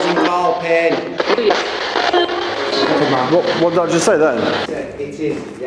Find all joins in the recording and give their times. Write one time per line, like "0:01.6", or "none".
0:01.1
0:04.7